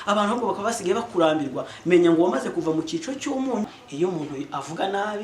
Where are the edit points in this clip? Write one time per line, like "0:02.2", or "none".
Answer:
0:03.8